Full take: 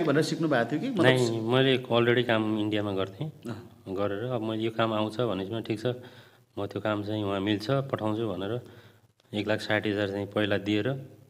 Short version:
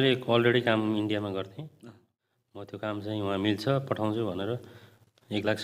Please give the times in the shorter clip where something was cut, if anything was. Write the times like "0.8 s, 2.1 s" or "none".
2.1 s